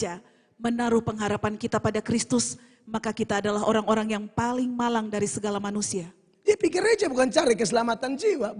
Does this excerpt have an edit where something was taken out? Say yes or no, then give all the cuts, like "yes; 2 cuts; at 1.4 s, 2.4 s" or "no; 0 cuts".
no; 0 cuts